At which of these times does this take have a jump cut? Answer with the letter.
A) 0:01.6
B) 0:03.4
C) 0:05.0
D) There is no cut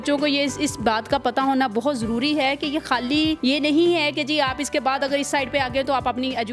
B